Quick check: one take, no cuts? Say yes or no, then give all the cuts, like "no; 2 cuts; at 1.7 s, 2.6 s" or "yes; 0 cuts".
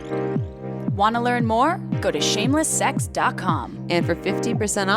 no; 1 cut; at 0.9 s